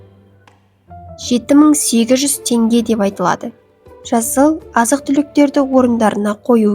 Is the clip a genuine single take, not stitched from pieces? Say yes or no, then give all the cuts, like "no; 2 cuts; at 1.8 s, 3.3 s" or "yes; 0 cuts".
no; 1 cut; at 1.3 s